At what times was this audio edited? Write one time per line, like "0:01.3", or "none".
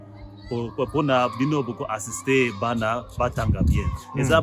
none